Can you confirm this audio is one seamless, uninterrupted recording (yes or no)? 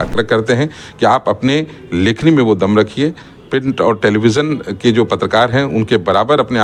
yes